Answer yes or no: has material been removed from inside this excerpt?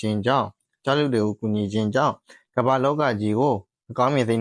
no